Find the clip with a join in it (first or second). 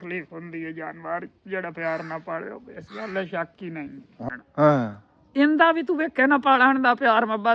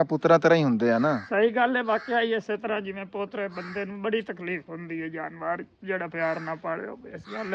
first